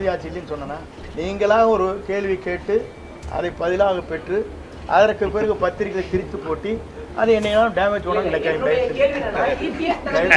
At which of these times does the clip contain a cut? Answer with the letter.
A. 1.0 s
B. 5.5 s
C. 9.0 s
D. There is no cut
A